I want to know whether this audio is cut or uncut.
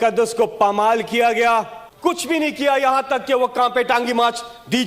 cut